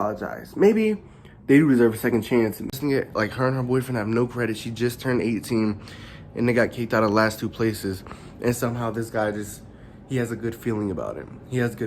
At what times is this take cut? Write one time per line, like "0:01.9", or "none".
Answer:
0:02.7